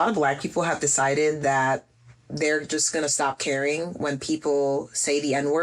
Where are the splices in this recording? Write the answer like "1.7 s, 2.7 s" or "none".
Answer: none